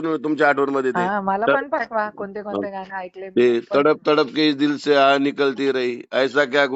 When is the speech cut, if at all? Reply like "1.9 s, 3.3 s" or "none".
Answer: 1.0 s